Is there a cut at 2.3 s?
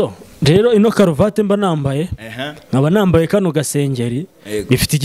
no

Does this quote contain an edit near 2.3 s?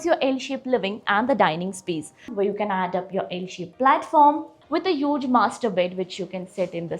yes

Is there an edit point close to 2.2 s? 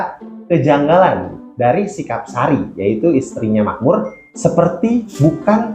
no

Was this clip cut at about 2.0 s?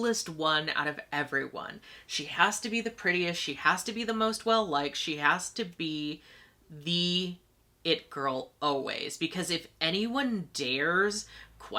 no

